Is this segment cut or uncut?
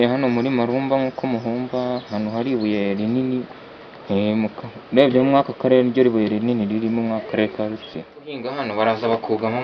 cut